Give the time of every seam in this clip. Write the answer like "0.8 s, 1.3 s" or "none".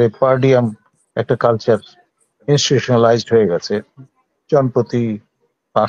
none